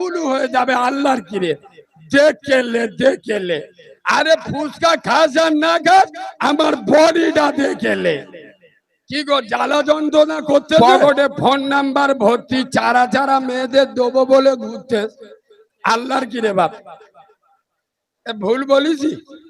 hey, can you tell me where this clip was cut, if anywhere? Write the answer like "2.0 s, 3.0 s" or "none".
10.8 s

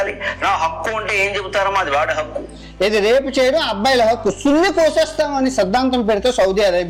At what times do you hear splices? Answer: none

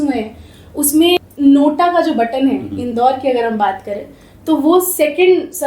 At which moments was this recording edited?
1.2 s

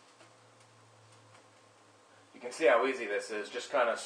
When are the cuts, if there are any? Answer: 2.7 s

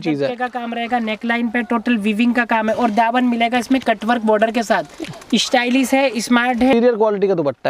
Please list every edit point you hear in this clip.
6.7 s

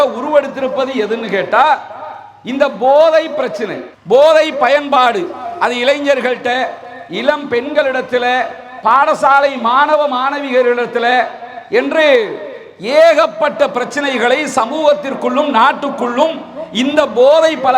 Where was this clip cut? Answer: none

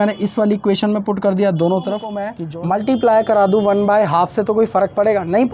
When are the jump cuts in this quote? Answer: 2.4 s

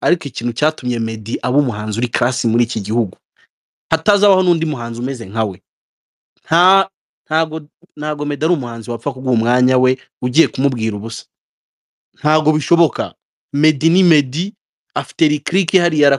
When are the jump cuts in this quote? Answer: none

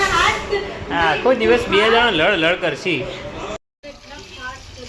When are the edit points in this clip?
3.6 s

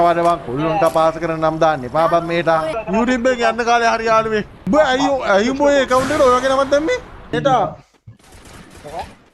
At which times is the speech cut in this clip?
2.8 s, 4.5 s, 7.3 s

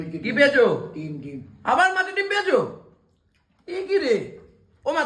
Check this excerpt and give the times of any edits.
none

